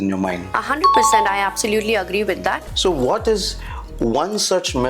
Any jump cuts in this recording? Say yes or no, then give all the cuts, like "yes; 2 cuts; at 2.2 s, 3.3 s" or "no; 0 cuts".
yes; 1 cut; at 2.7 s